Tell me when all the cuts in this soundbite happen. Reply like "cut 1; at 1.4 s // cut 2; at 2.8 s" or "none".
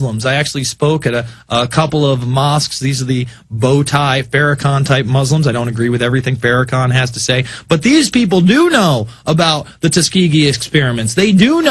cut 1; at 3.3 s